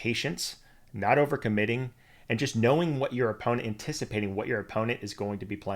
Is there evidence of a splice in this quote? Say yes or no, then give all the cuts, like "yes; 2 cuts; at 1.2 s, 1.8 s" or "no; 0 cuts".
no; 0 cuts